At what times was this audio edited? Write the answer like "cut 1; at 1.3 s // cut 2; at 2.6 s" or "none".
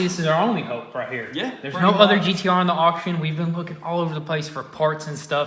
none